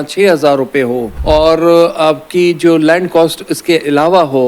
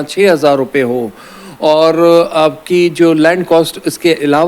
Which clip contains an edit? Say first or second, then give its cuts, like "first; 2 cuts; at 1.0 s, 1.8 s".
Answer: first; 1 cut; at 1.1 s